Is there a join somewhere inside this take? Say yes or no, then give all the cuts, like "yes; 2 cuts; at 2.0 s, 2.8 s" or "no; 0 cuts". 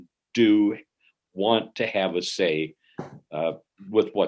no; 0 cuts